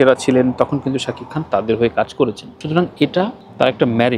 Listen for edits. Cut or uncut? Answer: uncut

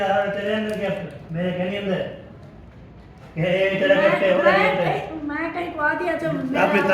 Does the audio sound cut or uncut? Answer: cut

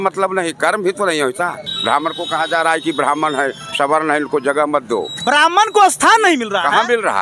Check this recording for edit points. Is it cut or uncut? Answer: cut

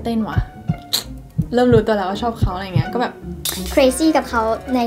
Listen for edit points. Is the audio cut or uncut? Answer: uncut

